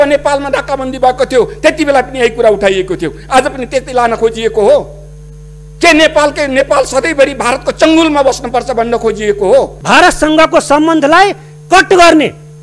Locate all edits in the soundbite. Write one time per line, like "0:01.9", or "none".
0:09.8